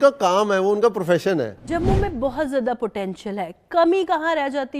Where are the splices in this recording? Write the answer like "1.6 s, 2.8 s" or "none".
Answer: 1.6 s